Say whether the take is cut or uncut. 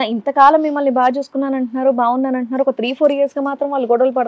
uncut